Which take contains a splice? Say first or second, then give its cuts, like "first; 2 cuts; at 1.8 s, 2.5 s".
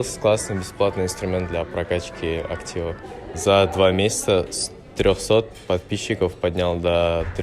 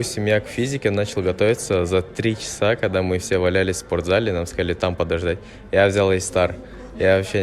first; 1 cut; at 3.2 s